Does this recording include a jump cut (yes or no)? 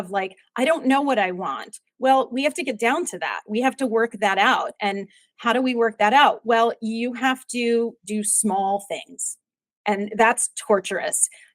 no